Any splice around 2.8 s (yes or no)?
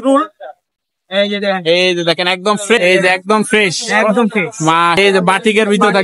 yes